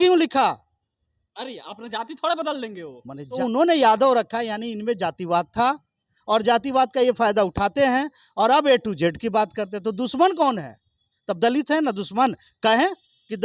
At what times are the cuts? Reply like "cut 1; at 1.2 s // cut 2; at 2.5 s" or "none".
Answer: cut 1; at 3.4 s